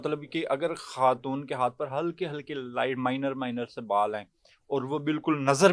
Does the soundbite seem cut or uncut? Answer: uncut